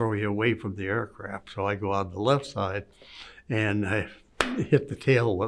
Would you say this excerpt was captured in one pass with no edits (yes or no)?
yes